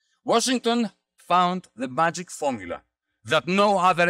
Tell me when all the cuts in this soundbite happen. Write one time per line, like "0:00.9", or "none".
0:01.1